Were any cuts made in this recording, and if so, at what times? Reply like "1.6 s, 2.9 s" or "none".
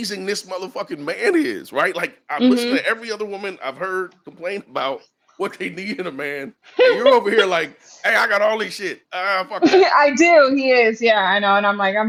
none